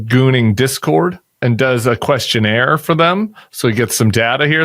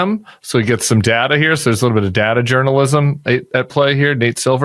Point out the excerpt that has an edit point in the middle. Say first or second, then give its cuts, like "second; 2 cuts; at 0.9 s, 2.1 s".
first; 1 cut; at 1.4 s